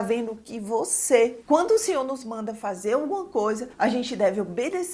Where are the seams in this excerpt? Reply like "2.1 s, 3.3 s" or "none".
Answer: 1.4 s